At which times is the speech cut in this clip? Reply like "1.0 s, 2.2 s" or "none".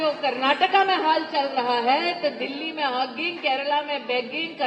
none